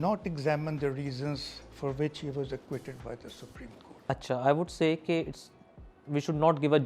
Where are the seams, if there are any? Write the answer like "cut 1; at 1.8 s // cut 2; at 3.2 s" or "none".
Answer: none